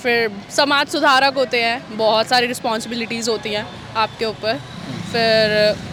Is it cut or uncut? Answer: uncut